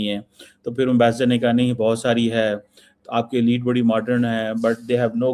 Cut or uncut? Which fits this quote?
uncut